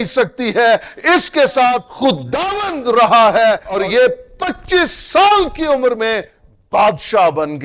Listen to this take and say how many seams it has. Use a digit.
2